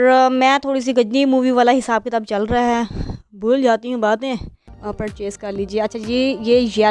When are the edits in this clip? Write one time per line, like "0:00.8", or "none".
0:04.8